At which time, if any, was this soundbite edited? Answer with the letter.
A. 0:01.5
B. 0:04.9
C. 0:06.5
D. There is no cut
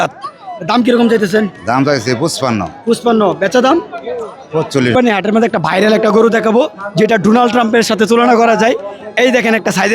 B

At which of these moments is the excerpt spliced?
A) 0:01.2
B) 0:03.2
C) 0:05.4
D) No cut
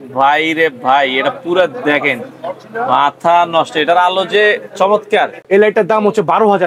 C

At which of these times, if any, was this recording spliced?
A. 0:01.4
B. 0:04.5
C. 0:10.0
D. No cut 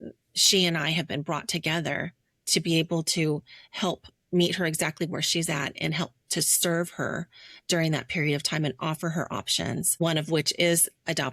C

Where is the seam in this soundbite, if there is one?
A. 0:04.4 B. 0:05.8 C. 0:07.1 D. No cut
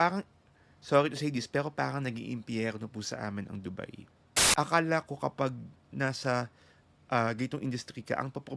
A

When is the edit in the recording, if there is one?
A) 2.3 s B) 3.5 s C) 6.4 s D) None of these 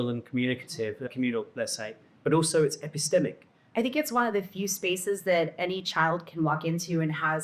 B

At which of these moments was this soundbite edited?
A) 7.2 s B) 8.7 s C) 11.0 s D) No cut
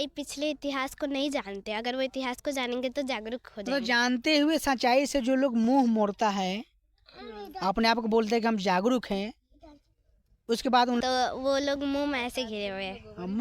C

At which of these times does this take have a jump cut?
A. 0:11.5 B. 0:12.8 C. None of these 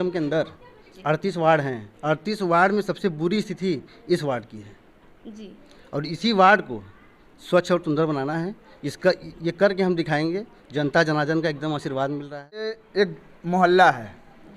B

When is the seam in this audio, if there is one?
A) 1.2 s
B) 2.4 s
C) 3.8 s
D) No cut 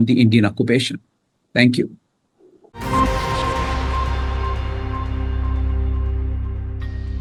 D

